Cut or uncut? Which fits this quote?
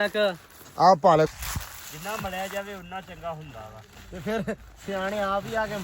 cut